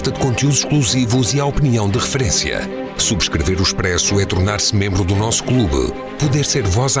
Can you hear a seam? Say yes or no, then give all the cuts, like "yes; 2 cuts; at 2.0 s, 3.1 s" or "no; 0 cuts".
no; 0 cuts